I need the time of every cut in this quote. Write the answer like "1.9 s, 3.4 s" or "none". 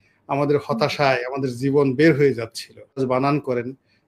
3.0 s